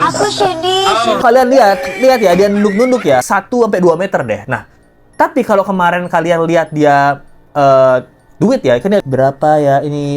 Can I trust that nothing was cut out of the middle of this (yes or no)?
no